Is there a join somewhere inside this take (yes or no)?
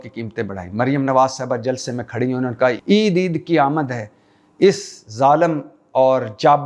yes